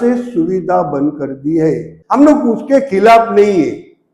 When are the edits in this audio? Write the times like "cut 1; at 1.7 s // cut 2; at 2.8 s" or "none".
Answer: cut 1; at 1.9 s